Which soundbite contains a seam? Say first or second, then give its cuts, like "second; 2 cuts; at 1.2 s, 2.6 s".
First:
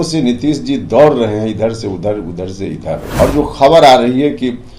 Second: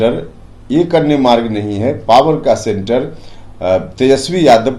first; 1 cut; at 3.1 s